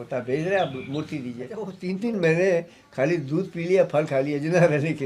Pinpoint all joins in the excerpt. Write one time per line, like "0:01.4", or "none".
0:01.8